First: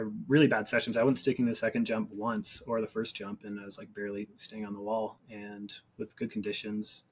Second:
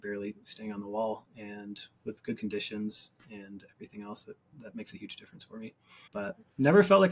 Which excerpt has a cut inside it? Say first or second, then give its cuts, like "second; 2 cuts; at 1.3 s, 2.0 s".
second; 2 cuts; at 4.5 s, 5.9 s